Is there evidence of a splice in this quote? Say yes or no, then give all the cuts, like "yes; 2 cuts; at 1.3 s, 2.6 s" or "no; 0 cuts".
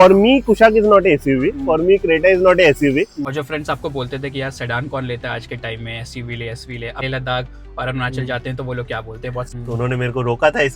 yes; 3 cuts; at 3.2 s, 7.0 s, 9.5 s